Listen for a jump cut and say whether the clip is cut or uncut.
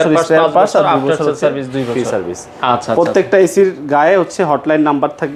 uncut